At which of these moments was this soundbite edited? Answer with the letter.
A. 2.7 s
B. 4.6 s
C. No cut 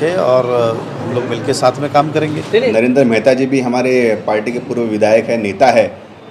A